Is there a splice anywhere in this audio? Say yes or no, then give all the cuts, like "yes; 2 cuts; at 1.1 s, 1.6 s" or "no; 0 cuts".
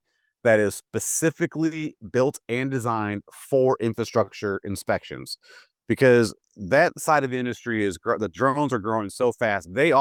no; 0 cuts